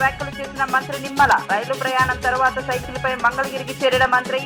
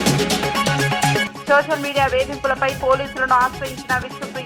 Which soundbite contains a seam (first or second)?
second